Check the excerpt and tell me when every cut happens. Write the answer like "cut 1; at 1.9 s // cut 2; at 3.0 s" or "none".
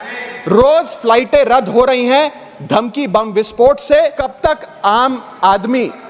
cut 1; at 4.2 s